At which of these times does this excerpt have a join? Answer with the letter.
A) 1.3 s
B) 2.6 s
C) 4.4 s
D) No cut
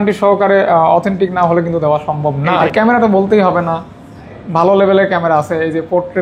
B